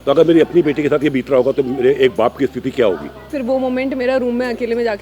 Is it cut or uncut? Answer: cut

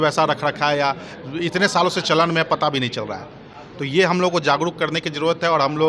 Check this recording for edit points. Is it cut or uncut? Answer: uncut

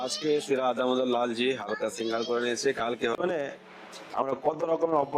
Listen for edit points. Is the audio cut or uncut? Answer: cut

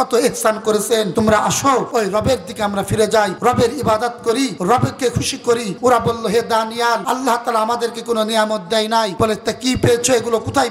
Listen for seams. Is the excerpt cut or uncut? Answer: cut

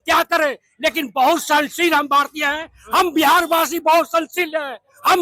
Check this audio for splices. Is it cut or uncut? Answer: uncut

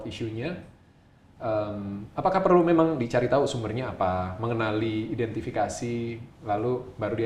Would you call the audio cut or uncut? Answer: uncut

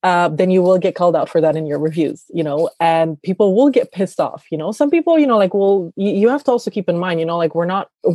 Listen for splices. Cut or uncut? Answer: uncut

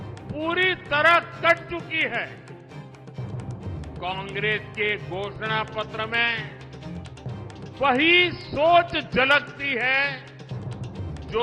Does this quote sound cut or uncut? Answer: cut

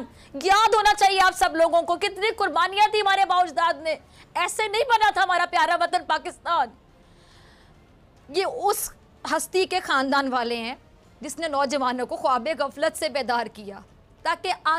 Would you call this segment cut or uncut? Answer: uncut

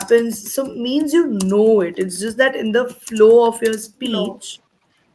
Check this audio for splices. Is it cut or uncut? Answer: uncut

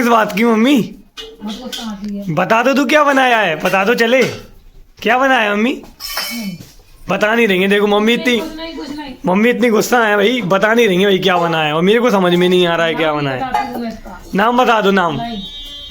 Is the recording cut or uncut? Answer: cut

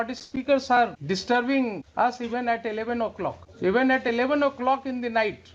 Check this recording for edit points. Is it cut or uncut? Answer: cut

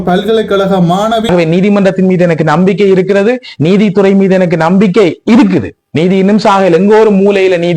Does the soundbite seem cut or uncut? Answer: cut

